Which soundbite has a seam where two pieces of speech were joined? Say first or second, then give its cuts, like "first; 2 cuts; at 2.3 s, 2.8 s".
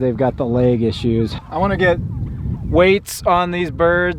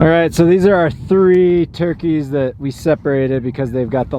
first; 1 cut; at 1.4 s